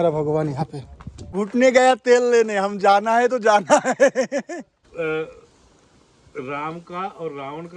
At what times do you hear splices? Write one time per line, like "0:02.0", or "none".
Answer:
0:01.3
0:04.8

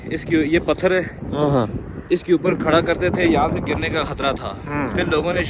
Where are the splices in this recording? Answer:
none

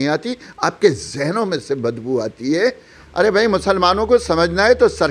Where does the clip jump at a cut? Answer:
0:02.9

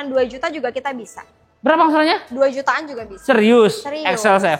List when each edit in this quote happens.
none

